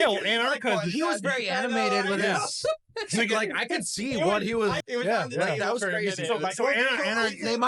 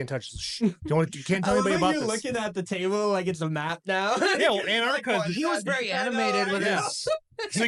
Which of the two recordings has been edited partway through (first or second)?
first